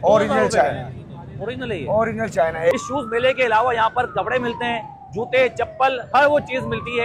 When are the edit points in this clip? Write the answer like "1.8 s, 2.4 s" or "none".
2.7 s